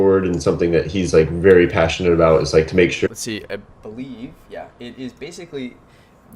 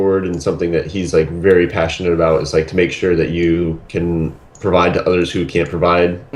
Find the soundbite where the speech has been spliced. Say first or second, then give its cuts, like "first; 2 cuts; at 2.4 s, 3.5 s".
second; 1 cut; at 3.1 s